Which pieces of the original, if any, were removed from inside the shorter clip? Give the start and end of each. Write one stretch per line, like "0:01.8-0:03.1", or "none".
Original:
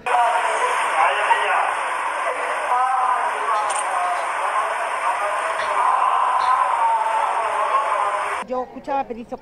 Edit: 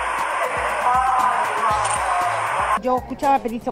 0:04.7-0:08.5